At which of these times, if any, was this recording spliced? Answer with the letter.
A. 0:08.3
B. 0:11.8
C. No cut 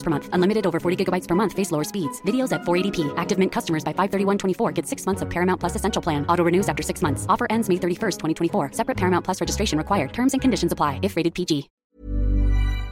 B